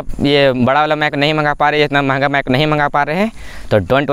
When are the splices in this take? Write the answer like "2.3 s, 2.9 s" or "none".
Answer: none